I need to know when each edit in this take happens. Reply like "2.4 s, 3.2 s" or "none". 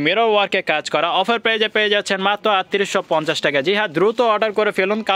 none